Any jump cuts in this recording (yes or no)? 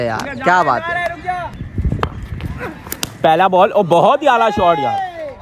yes